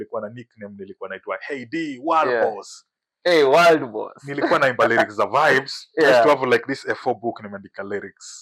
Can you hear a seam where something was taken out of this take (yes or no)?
no